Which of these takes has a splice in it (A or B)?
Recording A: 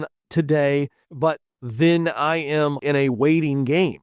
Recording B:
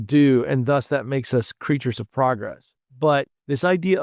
A